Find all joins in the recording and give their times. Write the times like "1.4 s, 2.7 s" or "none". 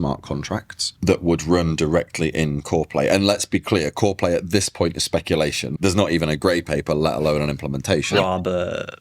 5.7 s, 8.1 s